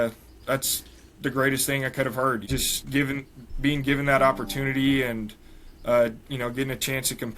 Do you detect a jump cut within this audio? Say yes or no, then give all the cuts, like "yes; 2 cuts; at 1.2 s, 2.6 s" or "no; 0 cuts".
yes; 1 cut; at 2.4 s